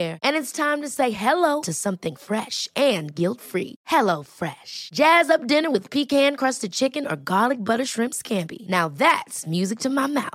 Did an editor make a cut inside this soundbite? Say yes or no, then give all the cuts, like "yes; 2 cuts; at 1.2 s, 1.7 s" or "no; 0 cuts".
no; 0 cuts